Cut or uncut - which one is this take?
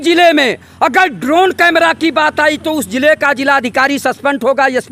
uncut